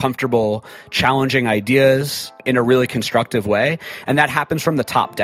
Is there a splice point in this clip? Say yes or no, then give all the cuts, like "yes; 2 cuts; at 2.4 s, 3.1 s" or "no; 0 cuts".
yes; 1 cut; at 2.4 s